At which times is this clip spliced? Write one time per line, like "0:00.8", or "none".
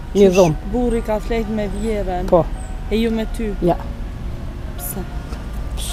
none